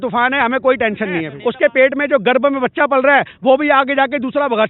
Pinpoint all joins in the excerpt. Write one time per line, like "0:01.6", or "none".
0:01.3